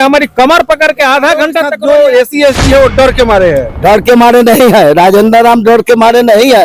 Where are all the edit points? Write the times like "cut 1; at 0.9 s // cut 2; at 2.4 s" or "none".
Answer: cut 1; at 1.7 s